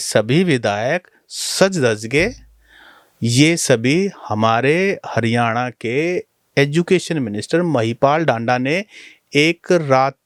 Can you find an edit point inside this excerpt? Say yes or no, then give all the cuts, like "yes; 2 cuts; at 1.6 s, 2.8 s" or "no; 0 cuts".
no; 0 cuts